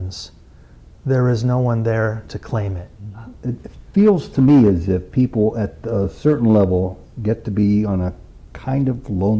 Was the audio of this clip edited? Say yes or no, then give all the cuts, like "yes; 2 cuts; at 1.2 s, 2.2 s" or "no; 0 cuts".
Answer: yes; 1 cut; at 3.1 s